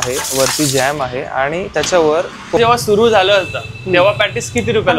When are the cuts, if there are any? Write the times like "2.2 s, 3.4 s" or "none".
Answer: 2.6 s